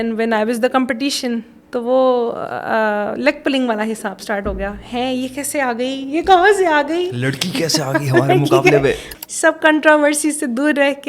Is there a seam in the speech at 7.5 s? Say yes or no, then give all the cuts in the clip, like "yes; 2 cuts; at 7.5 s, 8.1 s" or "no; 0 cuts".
no; 1 cut; at 9.1 s